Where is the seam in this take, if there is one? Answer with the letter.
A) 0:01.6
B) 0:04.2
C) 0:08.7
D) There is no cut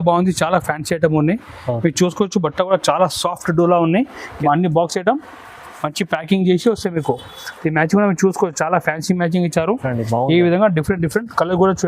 B